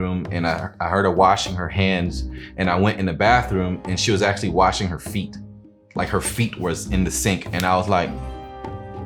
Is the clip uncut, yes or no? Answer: yes